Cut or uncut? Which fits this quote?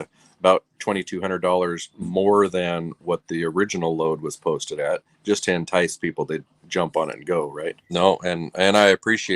cut